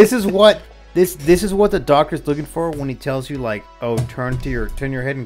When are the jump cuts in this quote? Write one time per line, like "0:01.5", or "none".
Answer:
none